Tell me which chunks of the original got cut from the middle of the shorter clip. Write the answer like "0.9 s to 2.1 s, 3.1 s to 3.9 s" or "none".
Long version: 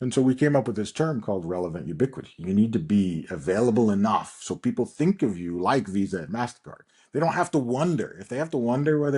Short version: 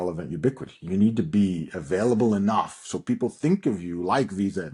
none